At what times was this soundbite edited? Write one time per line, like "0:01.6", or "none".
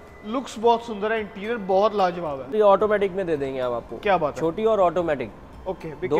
0:02.5